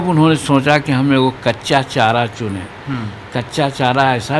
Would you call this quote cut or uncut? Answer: uncut